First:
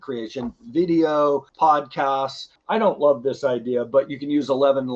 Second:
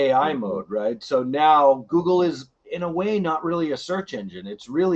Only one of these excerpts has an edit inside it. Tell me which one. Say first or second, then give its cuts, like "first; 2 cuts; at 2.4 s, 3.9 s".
first; 2 cuts; at 1.5 s, 2.5 s